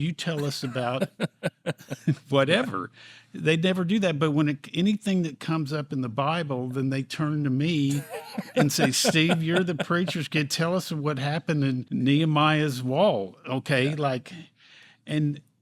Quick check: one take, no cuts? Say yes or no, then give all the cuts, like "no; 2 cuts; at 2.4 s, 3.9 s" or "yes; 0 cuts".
no; 1 cut; at 11.8 s